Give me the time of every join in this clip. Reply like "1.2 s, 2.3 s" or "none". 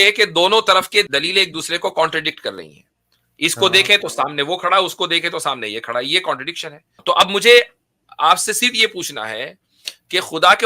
1.1 s, 7.0 s